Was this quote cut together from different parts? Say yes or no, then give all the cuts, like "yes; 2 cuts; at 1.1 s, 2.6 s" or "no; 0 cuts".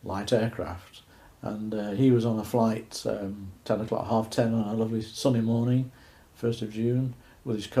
yes; 1 cut; at 4.0 s